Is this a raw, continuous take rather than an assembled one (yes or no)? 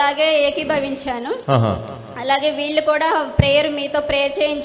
yes